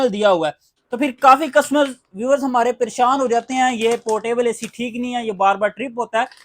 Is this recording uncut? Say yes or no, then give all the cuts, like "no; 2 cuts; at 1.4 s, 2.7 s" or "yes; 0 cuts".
no; 1 cut; at 0.9 s